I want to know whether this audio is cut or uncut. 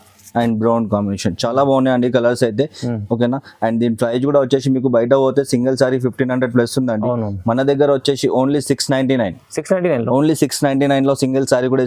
uncut